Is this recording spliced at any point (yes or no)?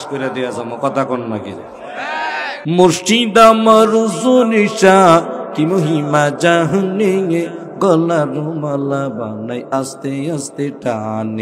yes